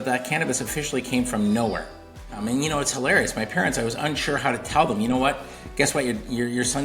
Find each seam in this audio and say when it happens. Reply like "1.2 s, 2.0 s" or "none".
2.4 s